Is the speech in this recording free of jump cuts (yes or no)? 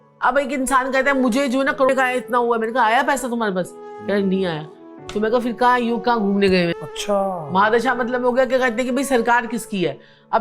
no